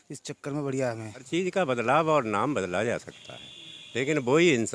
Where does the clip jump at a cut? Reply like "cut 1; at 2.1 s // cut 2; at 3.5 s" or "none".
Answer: cut 1; at 1.2 s